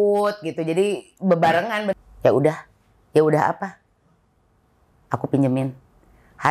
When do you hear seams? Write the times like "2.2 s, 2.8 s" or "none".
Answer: 2.0 s